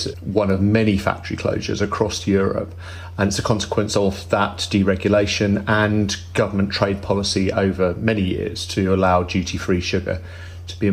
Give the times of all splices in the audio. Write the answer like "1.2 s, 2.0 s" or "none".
none